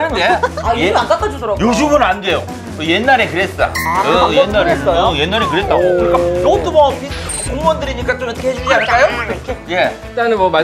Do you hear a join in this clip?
no; 0 cuts

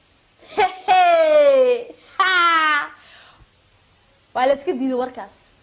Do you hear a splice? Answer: no; 0 cuts

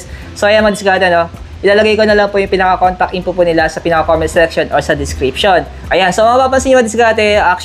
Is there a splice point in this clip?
no; 0 cuts

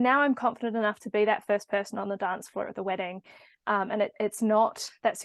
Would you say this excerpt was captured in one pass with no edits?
yes; 0 cuts

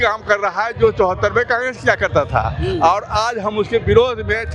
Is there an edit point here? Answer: no; 0 cuts

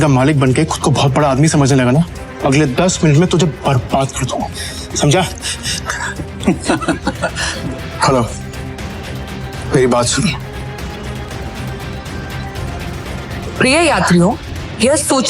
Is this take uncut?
no; 3 cuts; at 2.2 s, 7.5 s, 11.3 s

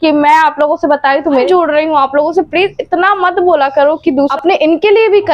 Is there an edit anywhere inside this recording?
yes; 2 cuts; at 1.4 s, 4.3 s

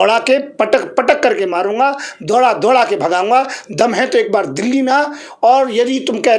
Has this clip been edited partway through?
no; 0 cuts

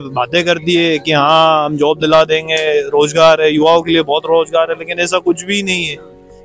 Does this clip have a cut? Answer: no; 0 cuts

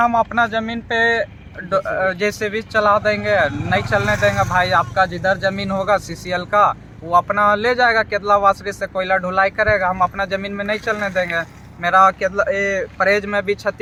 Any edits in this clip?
no; 0 cuts

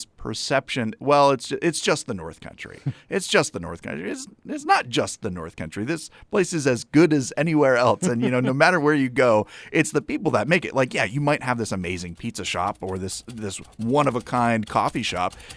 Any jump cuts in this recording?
yes; 1 cut; at 1.0 s

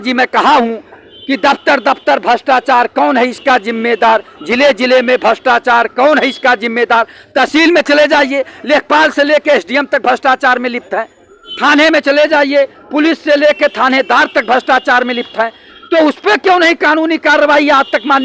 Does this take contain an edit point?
no; 0 cuts

